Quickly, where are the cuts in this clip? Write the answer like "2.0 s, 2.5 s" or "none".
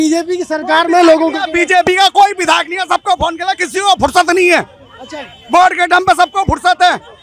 none